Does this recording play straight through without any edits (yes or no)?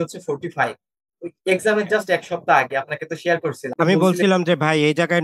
no